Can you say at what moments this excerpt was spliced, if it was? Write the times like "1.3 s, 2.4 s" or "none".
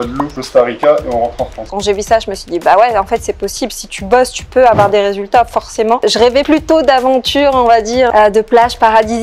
1.7 s, 6.0 s